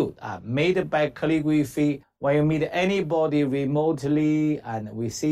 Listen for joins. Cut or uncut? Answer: cut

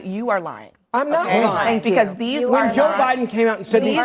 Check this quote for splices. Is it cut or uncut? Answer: cut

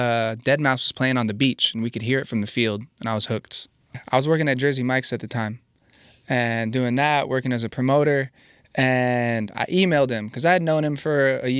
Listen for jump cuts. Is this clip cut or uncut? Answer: cut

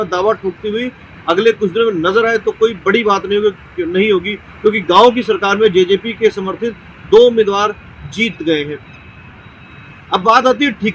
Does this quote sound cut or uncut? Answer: uncut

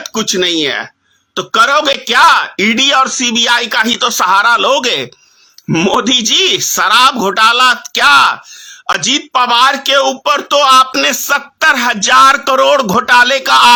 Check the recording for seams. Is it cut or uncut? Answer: uncut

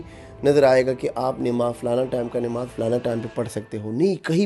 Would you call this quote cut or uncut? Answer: uncut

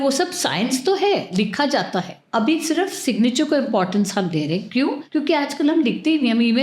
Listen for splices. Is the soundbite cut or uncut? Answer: cut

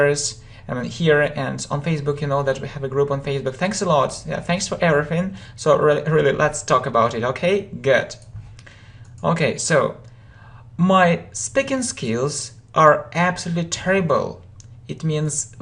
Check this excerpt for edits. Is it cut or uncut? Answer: cut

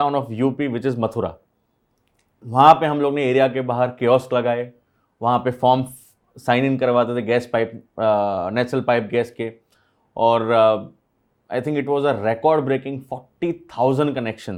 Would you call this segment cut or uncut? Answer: uncut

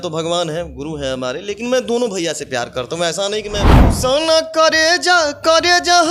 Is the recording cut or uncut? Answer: cut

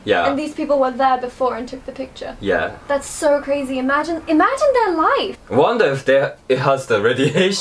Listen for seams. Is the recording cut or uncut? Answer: cut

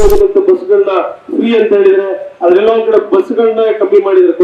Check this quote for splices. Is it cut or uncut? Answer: uncut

